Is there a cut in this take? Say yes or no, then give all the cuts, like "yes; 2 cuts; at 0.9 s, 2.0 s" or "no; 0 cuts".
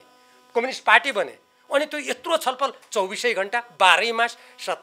no; 0 cuts